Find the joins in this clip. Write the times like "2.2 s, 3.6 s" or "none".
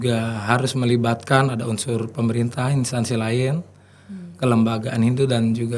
none